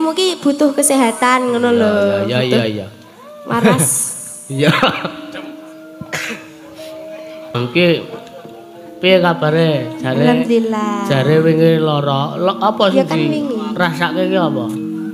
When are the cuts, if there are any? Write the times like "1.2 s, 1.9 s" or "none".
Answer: 7.6 s